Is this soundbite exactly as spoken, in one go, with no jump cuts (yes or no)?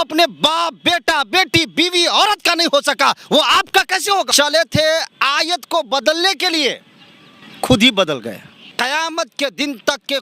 no